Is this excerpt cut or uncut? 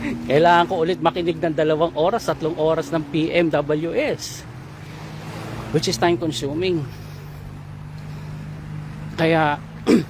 uncut